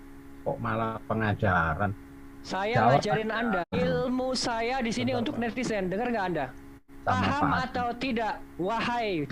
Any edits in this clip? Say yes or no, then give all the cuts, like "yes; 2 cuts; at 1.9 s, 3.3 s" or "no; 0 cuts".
yes; 2 cuts; at 3.7 s, 6.9 s